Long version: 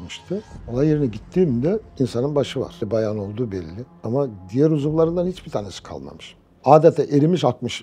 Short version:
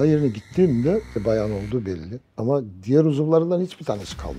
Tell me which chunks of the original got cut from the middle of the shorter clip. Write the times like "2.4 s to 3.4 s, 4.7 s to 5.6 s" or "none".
1.9 s to 2.7 s